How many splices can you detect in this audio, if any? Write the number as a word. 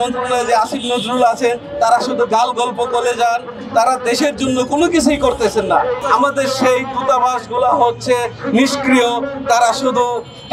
one